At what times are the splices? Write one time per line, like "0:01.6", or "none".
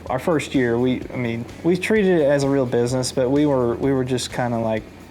0:01.5